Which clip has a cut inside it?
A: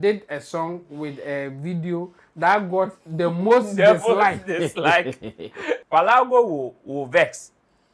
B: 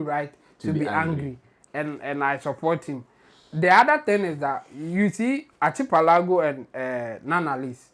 A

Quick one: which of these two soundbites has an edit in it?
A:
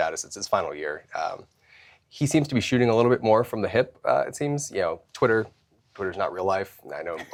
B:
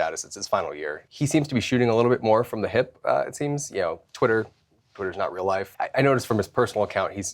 B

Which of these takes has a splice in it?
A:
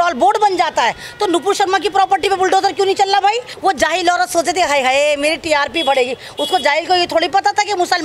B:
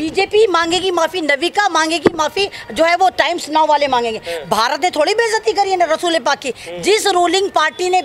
A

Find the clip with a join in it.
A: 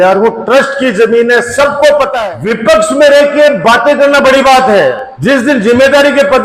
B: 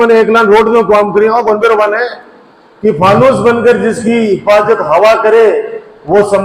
A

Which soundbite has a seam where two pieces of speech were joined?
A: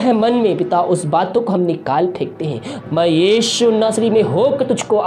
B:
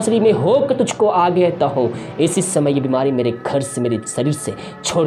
A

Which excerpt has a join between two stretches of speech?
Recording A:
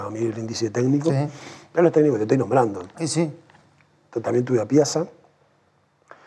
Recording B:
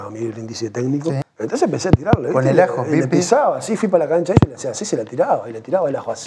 B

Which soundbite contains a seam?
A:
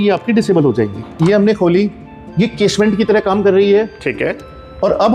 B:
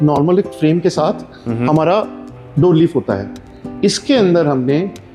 A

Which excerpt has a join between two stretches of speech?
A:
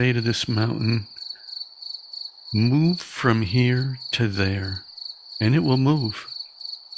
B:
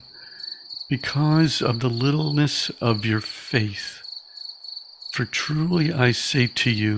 A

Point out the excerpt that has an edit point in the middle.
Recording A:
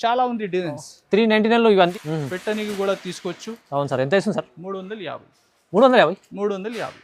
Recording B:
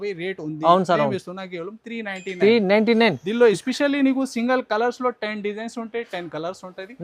A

